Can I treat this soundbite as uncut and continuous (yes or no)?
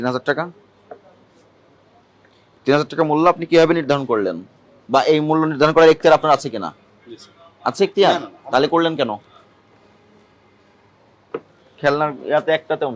yes